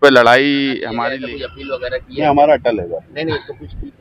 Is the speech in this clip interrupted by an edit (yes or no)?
yes